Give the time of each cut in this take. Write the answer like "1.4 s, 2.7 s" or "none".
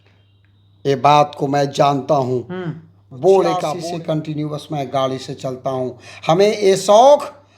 3.7 s